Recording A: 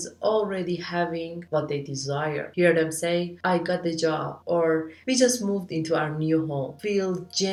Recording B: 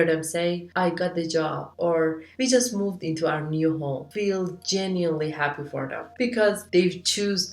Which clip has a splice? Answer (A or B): B